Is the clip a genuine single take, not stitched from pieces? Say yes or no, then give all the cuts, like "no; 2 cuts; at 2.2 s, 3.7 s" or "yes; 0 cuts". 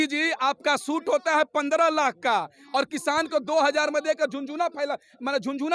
yes; 0 cuts